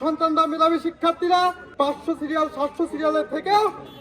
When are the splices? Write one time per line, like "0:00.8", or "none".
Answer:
0:01.6